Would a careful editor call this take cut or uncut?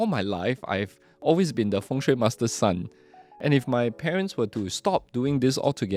uncut